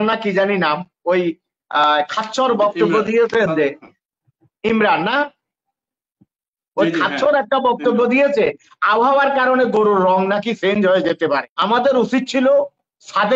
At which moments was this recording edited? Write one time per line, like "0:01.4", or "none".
0:11.5